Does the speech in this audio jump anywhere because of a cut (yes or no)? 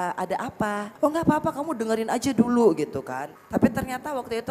yes